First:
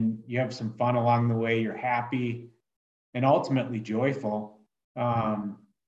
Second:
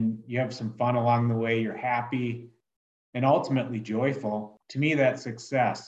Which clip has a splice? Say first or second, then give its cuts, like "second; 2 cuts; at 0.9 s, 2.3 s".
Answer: second; 1 cut; at 4.6 s